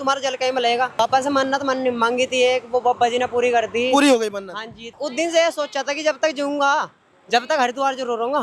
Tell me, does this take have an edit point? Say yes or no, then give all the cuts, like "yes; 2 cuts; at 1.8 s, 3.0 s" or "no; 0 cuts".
yes; 2 cuts; at 1.0 s, 4.9 s